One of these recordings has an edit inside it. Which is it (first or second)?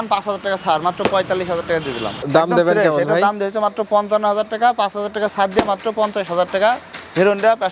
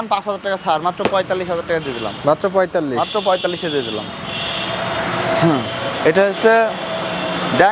first